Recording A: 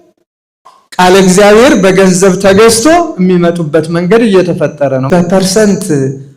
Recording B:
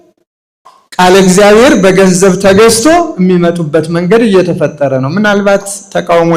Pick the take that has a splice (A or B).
A